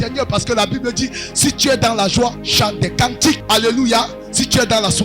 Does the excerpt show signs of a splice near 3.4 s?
yes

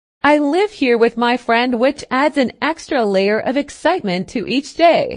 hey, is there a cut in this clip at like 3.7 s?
no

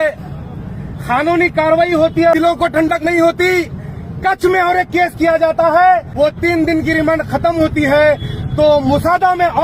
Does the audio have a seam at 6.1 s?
yes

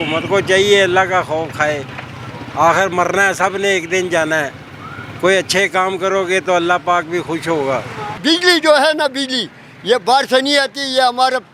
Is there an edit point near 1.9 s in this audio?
no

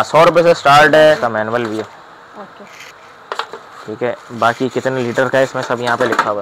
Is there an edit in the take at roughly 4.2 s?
no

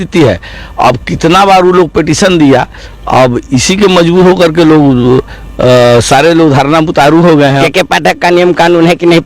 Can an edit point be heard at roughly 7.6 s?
yes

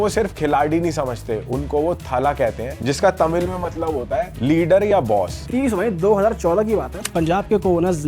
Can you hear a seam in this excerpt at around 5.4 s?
yes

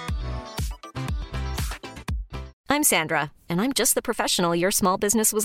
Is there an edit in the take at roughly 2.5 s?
yes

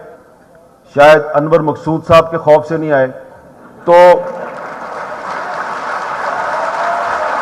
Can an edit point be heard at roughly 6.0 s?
no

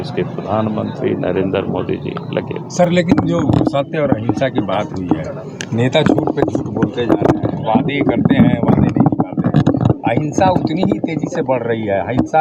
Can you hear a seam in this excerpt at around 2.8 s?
no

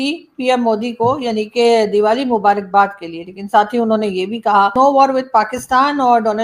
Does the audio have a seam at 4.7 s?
yes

